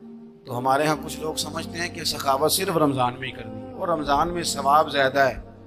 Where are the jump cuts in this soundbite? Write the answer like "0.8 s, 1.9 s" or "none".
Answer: none